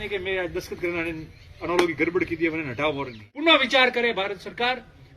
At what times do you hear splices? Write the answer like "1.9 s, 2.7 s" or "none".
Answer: 3.2 s